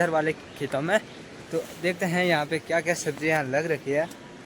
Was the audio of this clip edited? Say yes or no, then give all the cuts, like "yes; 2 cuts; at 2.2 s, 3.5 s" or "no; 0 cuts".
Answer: no; 0 cuts